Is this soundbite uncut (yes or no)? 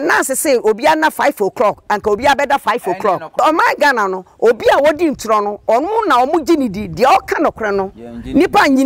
no